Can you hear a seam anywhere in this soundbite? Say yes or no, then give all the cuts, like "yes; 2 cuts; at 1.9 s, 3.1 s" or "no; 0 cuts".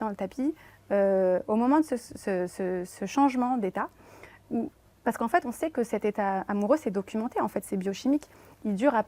no; 0 cuts